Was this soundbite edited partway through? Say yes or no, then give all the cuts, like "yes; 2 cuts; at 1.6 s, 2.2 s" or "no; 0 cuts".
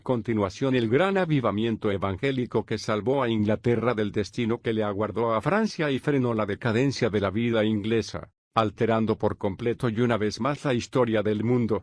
yes; 1 cut; at 2.0 s